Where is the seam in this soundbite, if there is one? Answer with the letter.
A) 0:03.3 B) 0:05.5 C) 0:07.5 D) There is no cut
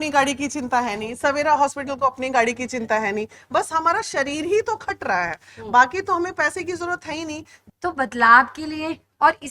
C